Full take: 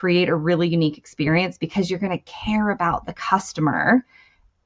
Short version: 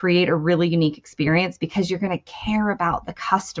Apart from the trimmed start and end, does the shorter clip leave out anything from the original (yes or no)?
no